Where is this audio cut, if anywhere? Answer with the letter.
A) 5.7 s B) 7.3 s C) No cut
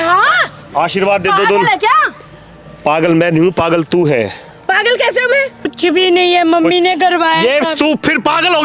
A